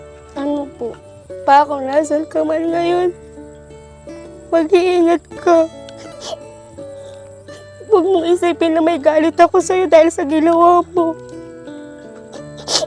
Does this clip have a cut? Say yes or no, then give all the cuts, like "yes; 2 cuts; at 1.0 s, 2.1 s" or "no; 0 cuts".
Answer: yes; 1 cut; at 1.1 s